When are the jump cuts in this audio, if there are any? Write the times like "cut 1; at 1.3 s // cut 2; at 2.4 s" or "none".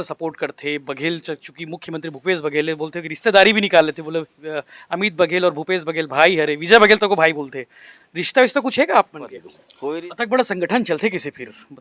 cut 1; at 9.9 s

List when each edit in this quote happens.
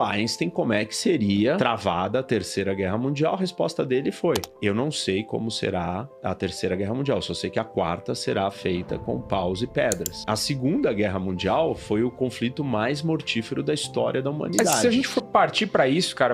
cut 1; at 1.6 s // cut 2; at 14.8 s

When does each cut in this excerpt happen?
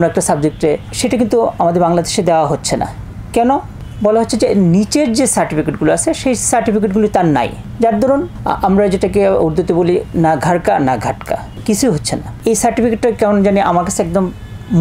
none

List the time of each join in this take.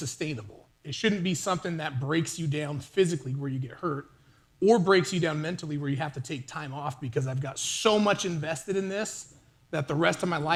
none

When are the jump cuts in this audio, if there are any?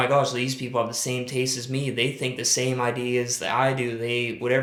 none

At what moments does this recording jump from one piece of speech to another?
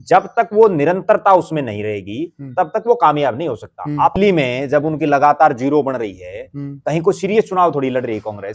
cut 1; at 4.2 s

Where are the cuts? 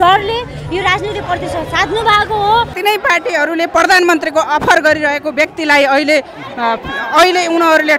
cut 1; at 2.7 s

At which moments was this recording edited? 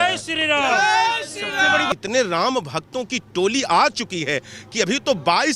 cut 1; at 1.9 s

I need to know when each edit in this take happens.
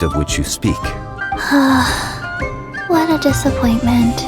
cut 1; at 1.1 s

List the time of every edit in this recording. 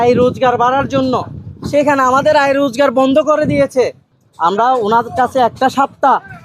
cut 1; at 4.0 s

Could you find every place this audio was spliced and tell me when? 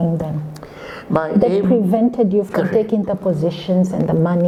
none

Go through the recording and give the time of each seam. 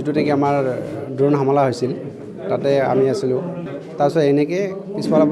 cut 1; at 3.6 s

